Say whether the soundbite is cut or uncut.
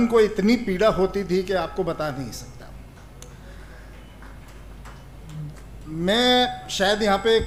uncut